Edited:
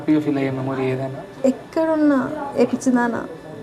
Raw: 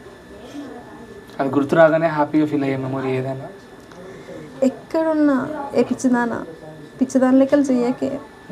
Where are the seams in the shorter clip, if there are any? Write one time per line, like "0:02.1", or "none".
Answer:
0:01.2